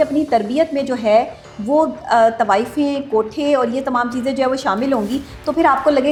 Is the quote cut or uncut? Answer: uncut